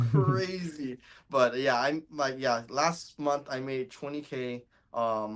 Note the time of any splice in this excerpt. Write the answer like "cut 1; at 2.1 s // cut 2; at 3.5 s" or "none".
none